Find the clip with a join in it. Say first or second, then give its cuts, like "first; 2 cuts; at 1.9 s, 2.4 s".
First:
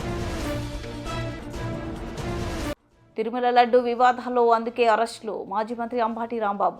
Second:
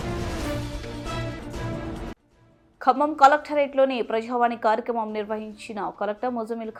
first; 1 cut; at 2.1 s